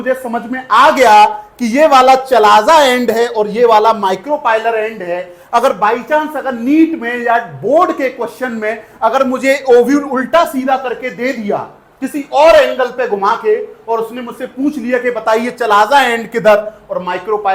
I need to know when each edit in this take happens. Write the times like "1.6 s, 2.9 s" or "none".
none